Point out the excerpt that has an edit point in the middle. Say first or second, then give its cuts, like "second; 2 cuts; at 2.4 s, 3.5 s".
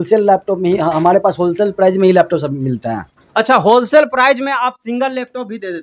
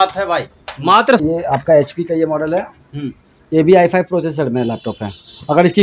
second; 1 cut; at 1.2 s